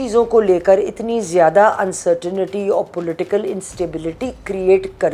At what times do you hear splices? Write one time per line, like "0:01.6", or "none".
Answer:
none